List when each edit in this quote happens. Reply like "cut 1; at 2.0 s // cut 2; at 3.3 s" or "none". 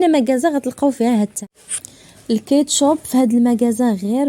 cut 1; at 1.4 s

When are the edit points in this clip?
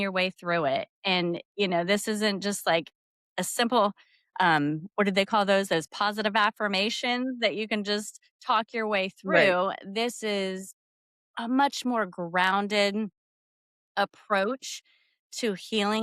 none

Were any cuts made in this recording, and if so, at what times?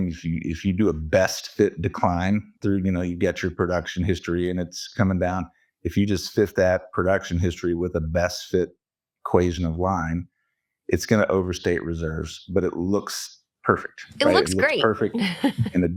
none

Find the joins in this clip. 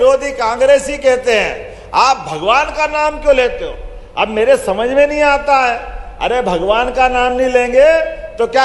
none

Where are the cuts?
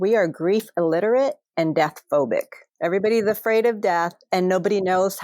cut 1; at 2.6 s

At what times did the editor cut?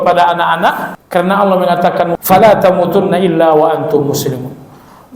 cut 1; at 0.9 s // cut 2; at 2.1 s

